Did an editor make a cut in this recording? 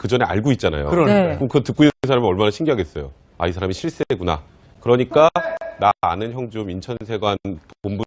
no; 0 cuts

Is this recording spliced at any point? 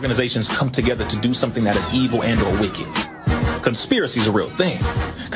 no; 0 cuts

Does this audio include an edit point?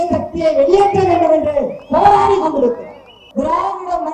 yes; 1 cut; at 3.2 s

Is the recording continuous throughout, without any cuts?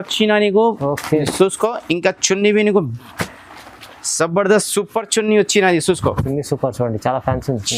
yes; 0 cuts

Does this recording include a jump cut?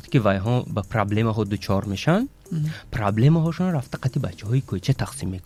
no; 0 cuts

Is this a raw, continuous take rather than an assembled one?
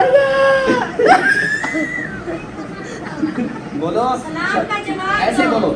yes; 0 cuts

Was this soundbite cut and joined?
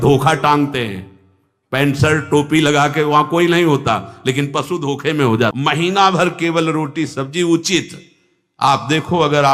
yes; 1 cut; at 5.5 s

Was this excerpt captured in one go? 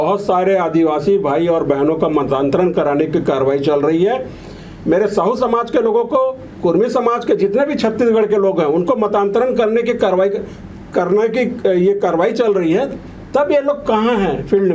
yes; 0 cuts

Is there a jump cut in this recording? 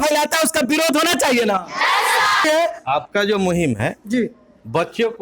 yes; 1 cut; at 2.4 s

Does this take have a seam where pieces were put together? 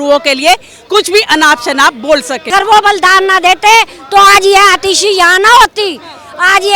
yes; 1 cut; at 2.5 s

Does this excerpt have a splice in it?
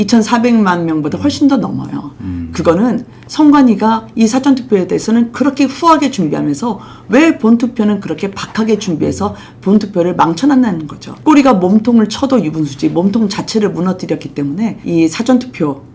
no; 0 cuts

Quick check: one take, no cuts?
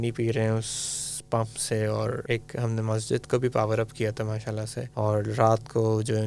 no; 2 cuts; at 2.2 s, 4.8 s

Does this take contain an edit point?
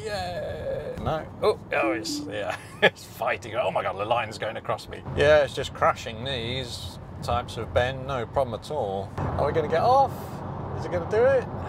yes; 3 cuts; at 1.0 s, 5.0 s, 9.2 s

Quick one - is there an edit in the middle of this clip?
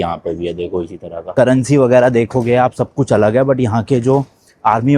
yes; 1 cut; at 1.2 s

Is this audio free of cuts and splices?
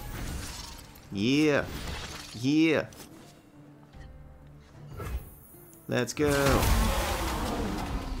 yes; 0 cuts

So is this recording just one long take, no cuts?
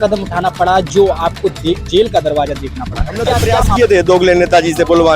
no; 1 cut; at 3.8 s

